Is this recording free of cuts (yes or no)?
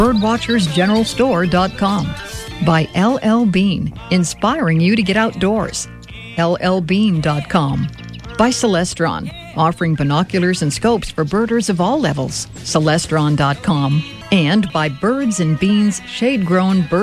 no